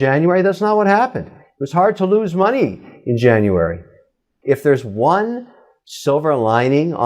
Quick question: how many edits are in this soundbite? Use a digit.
1